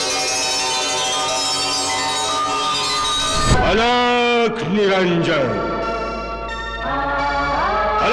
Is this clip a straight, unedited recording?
no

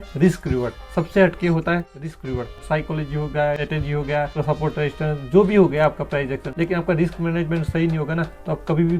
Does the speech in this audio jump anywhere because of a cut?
yes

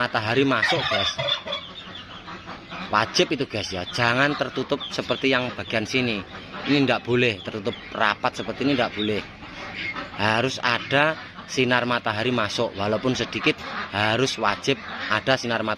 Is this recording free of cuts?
yes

